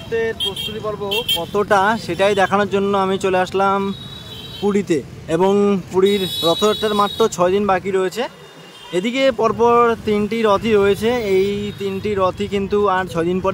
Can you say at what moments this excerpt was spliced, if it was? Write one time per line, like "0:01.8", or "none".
none